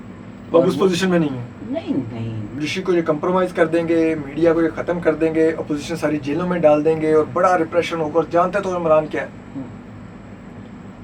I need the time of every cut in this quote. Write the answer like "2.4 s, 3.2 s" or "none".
2.5 s